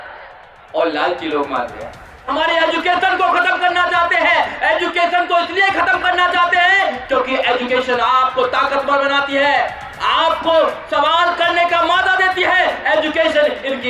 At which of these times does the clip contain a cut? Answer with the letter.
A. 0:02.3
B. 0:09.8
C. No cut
A